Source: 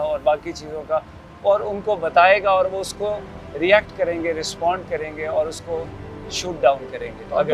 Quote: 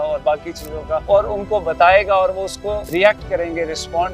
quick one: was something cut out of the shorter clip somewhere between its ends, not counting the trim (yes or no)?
yes